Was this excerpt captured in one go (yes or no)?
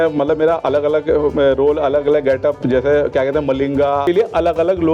no